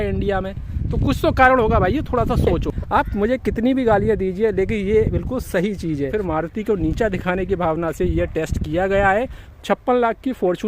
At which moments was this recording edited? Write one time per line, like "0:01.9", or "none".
0:02.8
0:06.1
0:09.4